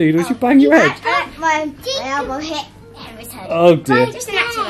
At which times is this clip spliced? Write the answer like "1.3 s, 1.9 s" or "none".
none